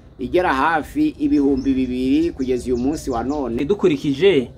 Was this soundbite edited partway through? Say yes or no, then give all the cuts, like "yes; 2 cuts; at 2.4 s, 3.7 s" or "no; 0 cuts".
yes; 1 cut; at 3.6 s